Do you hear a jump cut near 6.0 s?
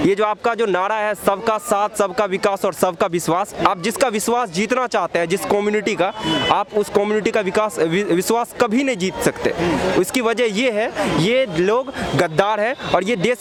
no; 0 cuts

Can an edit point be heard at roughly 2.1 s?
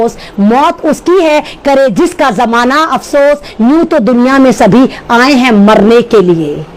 no; 0 cuts

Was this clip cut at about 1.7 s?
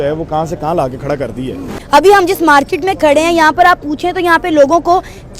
yes; 1 cut; at 1.7 s

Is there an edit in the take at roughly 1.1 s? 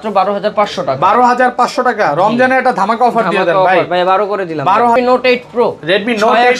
no; 1 cut; at 5.0 s

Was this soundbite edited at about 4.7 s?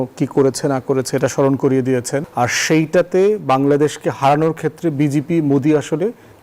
no; 1 cut; at 2.3 s

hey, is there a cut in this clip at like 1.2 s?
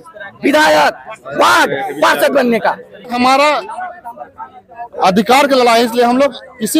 no; 1 cut; at 3.1 s

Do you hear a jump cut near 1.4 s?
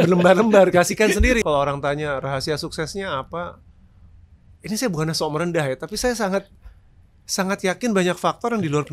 yes; 1 cut; at 1.4 s

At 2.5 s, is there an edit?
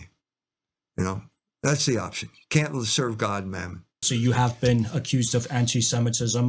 no; 1 cut; at 4.0 s

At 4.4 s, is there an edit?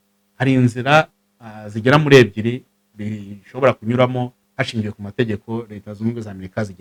no; 0 cuts

